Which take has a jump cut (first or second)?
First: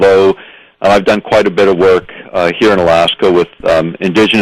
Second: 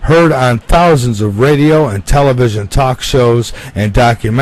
first